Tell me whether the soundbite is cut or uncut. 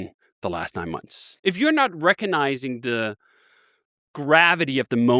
cut